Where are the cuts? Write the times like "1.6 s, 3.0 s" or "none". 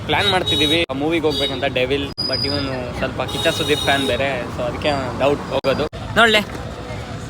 0.9 s, 2.2 s, 6.0 s